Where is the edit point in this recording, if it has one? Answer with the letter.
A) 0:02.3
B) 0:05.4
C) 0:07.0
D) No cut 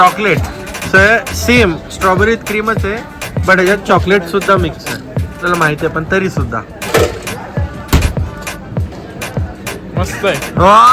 B